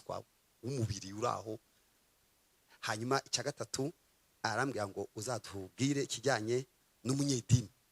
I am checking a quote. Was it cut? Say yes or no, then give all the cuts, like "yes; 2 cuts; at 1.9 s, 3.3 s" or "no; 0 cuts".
no; 0 cuts